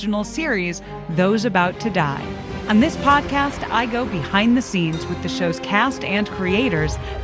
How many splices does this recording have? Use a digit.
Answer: 1